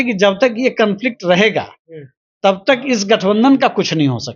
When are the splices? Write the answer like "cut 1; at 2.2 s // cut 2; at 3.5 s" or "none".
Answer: none